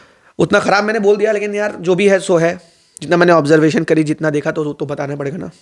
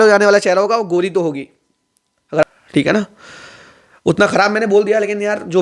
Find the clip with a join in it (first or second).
second